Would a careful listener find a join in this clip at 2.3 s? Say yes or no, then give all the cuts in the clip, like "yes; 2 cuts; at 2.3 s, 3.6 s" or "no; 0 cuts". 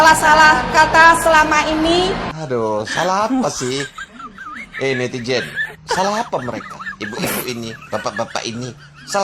yes; 1 cut; at 2.3 s